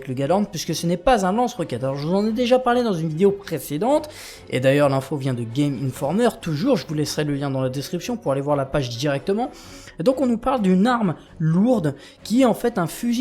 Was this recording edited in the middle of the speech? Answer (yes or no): yes